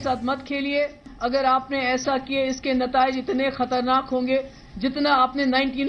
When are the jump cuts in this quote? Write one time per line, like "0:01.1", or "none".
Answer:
0:01.0